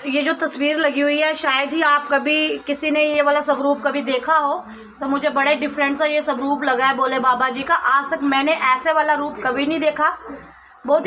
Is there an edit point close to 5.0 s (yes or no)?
no